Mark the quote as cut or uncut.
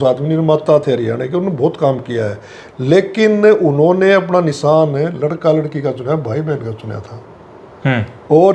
uncut